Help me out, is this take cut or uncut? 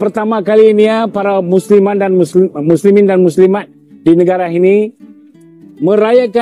uncut